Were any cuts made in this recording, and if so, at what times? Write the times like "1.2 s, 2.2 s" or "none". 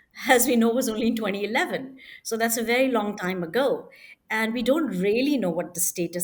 none